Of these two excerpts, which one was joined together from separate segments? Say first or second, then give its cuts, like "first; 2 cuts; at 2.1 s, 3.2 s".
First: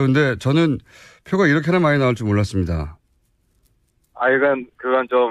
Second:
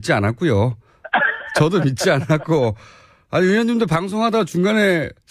second; 1 cut; at 3.3 s